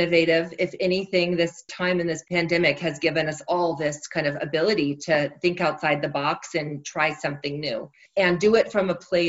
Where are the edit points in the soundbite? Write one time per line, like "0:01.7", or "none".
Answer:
0:08.0